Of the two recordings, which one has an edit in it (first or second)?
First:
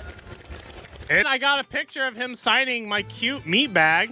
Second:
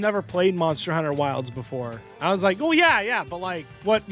first